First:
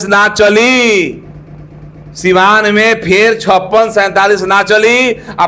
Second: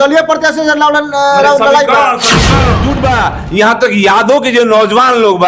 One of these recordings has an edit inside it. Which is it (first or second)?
second